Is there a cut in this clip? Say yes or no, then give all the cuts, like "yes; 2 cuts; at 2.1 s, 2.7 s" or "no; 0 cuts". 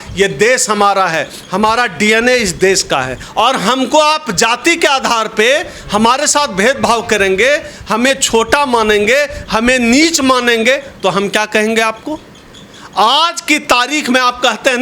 yes; 1 cut; at 3.2 s